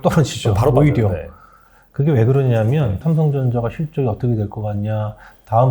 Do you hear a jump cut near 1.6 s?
no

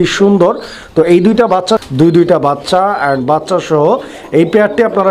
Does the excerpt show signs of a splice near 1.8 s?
yes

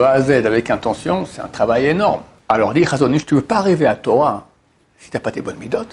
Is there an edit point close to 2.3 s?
yes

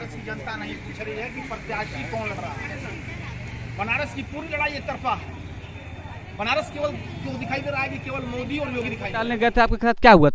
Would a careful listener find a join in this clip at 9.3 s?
yes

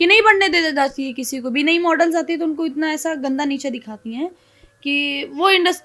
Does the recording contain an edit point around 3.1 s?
no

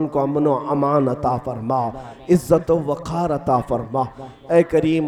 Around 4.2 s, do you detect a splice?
no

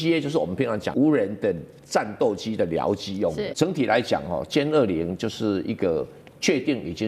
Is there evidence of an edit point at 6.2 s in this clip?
no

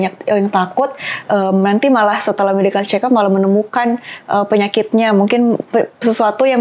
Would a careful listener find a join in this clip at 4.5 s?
no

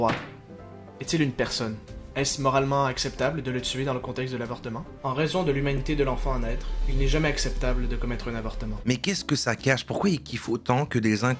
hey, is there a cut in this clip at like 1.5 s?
no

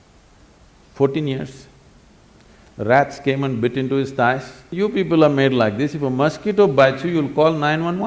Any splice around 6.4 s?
no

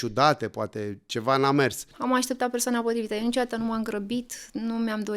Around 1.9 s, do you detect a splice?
yes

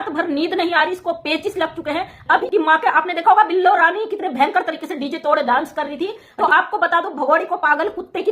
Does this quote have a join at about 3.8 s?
no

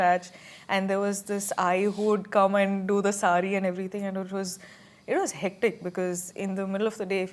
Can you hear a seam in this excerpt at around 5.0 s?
no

